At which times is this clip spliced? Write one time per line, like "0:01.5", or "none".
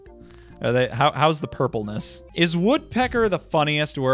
0:02.2